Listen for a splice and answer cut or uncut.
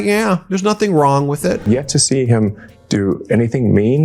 cut